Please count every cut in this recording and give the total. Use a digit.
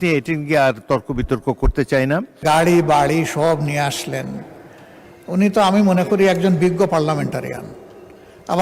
1